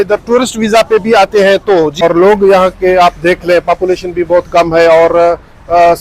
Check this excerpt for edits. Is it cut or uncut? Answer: cut